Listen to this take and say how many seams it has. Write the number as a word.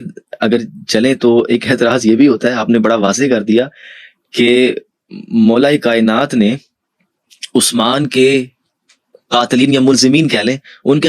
zero